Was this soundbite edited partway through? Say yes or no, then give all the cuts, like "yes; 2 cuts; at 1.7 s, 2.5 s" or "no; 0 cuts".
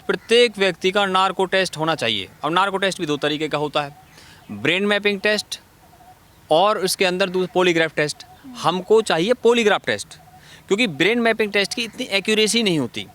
no; 0 cuts